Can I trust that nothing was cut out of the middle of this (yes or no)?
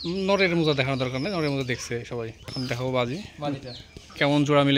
no